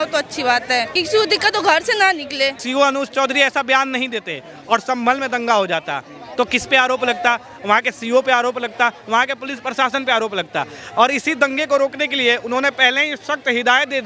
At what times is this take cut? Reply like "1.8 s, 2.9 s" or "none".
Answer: 1.0 s, 2.6 s